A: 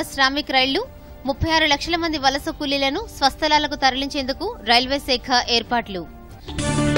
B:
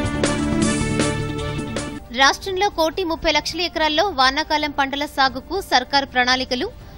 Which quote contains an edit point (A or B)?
B